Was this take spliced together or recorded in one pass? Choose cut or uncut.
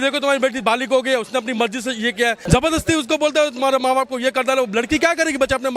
cut